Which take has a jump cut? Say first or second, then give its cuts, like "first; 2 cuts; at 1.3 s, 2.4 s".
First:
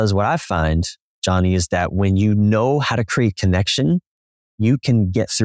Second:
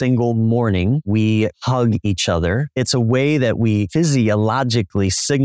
second; 3 cuts; at 1.1 s, 2.7 s, 3.9 s